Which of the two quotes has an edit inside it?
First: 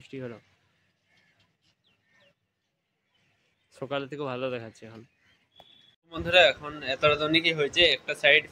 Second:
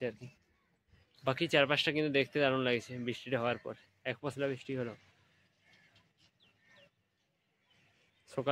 first; 1 cut; at 6.0 s

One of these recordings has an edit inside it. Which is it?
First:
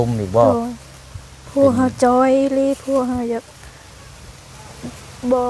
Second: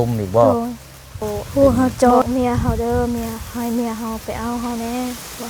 second; 1 cut; at 2.2 s

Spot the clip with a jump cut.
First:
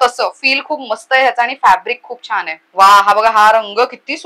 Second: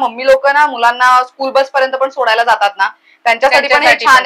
first; 1 cut; at 2.6 s

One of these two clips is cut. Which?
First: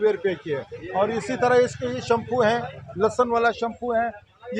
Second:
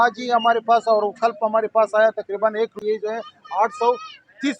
second; 1 cut; at 2.8 s

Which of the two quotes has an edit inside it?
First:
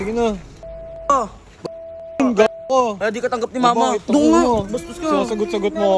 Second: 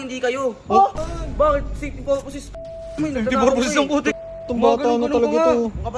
second; 1 cut; at 1.0 s

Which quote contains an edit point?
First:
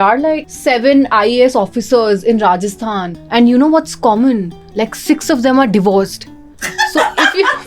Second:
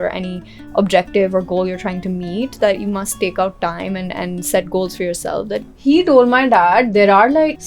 second; 1 cut; at 5.6 s

